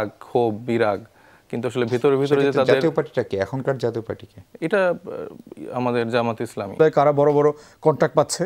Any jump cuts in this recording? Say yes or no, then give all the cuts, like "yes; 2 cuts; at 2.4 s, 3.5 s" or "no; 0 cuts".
yes; 1 cut; at 6.8 s